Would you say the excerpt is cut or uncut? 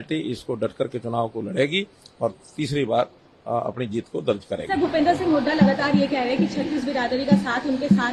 uncut